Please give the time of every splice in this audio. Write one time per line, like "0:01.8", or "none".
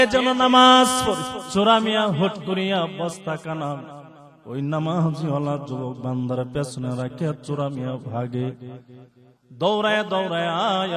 0:01.4